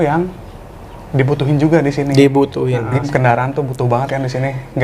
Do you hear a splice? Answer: yes; 1 cut; at 3.0 s

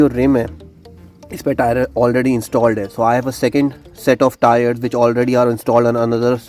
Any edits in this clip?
no; 0 cuts

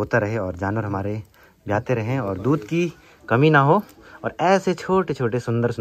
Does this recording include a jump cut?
no; 0 cuts

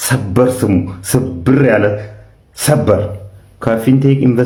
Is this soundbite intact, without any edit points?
yes; 0 cuts

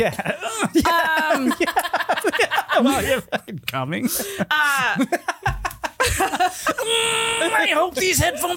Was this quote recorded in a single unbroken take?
yes; 0 cuts

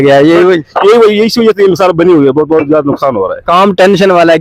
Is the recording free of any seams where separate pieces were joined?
yes; 0 cuts

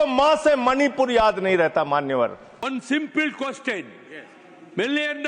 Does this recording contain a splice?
yes; 1 cut; at 2.7 s

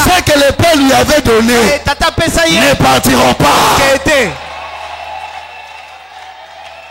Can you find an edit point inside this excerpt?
no; 0 cuts

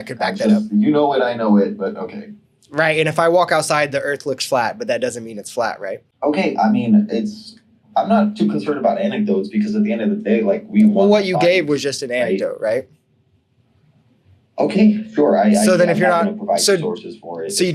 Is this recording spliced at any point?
no; 0 cuts

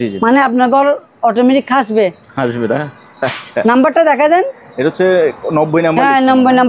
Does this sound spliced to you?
no; 0 cuts

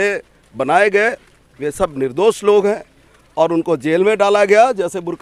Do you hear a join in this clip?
no; 0 cuts

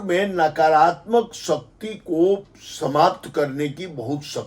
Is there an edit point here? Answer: no; 0 cuts

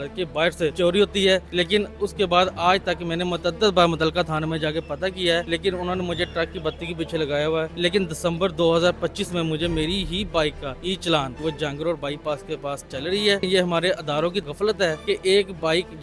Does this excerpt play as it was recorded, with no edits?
no; 8 cuts; at 0.7 s, 1.5 s, 5.5 s, 7.7 s, 10.7 s, 11.4 s, 13.4 s, 14.6 s

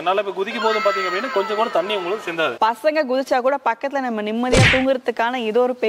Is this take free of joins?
no; 1 cut; at 2.6 s

